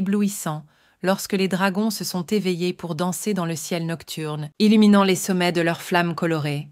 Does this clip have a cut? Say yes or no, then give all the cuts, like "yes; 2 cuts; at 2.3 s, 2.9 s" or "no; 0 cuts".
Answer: yes; 1 cut; at 4.4 s